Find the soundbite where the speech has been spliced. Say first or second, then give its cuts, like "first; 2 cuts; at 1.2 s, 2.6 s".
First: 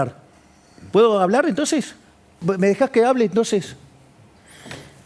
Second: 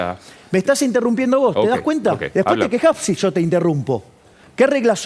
first; 1 cut; at 2.4 s